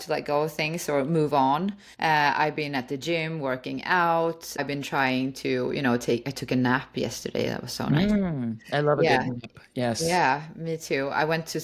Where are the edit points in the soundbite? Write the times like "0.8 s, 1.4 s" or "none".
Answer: 1.8 s, 4.6 s